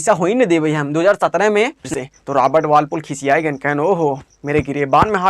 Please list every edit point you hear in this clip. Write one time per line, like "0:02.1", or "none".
0:01.9